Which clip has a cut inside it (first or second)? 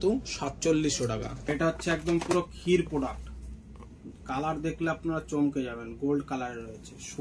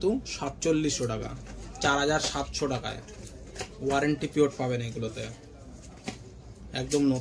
first